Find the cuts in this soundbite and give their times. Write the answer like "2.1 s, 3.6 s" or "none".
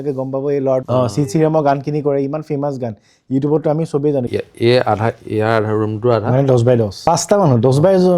0.8 s, 4.3 s, 7.0 s